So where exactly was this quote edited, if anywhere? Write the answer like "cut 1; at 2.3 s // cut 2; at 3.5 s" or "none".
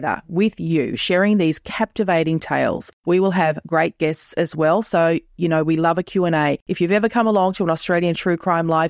none

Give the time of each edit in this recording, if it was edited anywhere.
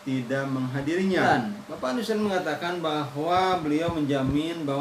cut 1; at 1.3 s

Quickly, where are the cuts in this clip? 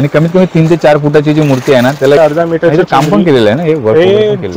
cut 1; at 2.2 s

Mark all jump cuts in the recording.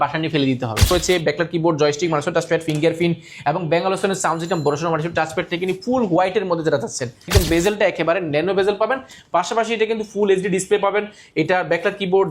cut 1; at 0.9 s // cut 2; at 7.3 s

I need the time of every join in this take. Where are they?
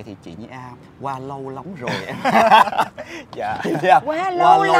none

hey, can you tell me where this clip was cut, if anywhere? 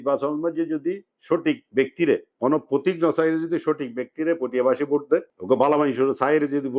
cut 1; at 2.3 s // cut 2; at 5.3 s

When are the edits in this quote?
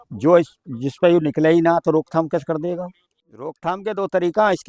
cut 1; at 3.6 s

